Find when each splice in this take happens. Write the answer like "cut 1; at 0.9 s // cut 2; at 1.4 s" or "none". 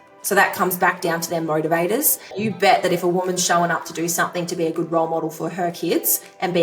cut 1; at 2.3 s